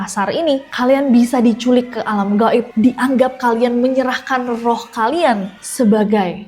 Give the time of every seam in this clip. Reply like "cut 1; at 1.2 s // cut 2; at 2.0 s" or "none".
cut 1; at 2.7 s